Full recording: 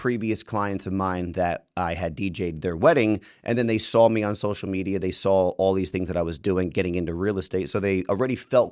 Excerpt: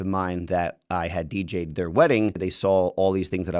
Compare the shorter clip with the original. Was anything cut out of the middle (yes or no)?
yes